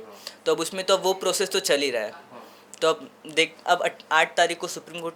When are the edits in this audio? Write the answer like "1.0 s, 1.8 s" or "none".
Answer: none